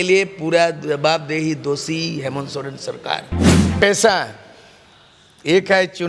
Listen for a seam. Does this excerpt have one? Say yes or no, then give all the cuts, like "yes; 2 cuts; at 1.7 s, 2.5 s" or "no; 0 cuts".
yes; 1 cut; at 3.4 s